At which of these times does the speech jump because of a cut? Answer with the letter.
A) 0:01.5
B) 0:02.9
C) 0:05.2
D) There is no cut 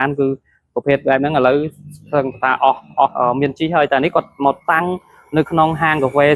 D